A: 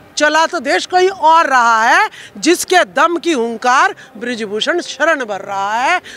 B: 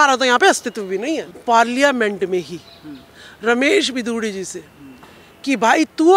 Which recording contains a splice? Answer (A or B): B